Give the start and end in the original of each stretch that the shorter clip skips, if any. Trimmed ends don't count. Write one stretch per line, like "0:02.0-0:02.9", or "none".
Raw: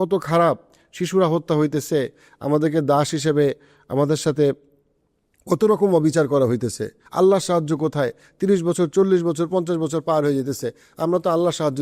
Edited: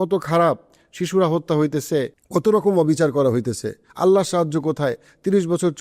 0:02.2-0:05.3